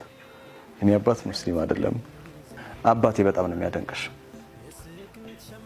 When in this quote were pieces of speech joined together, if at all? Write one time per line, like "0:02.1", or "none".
none